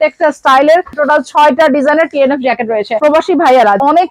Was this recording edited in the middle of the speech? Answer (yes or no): yes